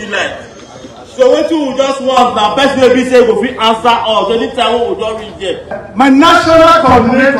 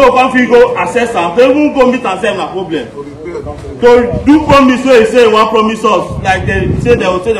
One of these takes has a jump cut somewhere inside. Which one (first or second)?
first